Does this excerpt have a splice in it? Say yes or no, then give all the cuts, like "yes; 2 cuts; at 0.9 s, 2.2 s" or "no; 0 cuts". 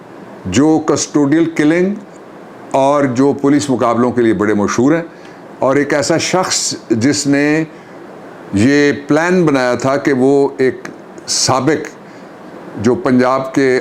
no; 0 cuts